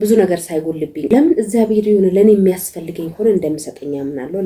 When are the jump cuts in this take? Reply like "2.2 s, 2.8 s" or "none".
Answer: 1.1 s